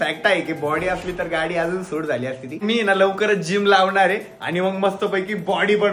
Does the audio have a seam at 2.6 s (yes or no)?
yes